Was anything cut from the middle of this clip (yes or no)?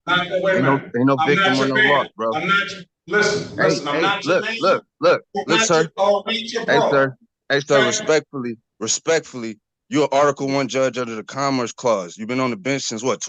no